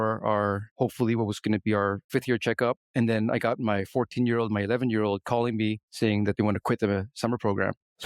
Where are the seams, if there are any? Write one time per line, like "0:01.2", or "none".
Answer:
none